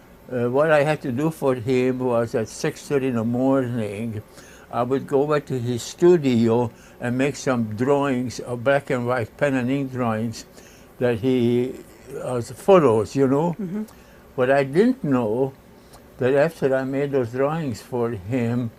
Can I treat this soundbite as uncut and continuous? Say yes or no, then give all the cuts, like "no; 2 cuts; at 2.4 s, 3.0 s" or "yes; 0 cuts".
no; 1 cut; at 16.5 s